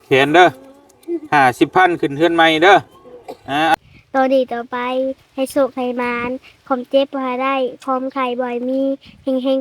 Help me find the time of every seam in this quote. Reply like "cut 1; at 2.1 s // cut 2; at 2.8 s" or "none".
cut 1; at 3.7 s